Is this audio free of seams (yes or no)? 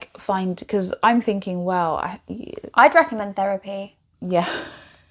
yes